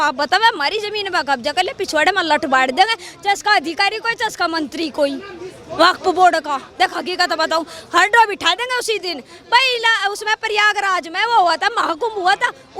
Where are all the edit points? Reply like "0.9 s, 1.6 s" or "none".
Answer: none